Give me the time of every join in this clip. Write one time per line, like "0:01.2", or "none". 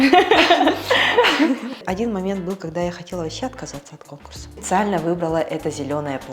0:01.8
0:04.5